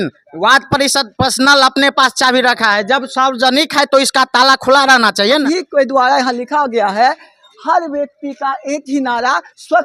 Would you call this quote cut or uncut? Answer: cut